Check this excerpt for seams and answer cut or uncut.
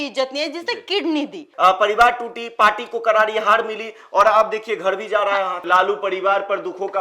cut